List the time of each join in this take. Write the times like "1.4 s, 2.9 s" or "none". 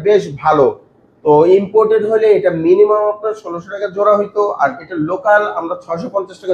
none